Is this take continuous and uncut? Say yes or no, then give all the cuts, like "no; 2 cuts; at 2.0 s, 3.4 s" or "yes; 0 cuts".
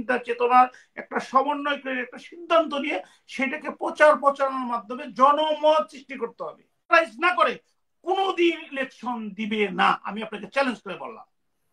no; 1 cut; at 6.9 s